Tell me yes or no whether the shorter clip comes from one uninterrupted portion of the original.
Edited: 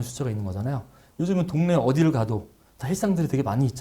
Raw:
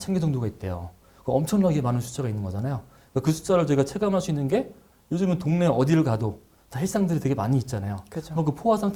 no